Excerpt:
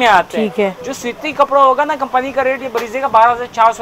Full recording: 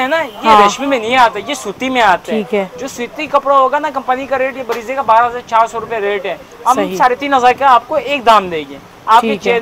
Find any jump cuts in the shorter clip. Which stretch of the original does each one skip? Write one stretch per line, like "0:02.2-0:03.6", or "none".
none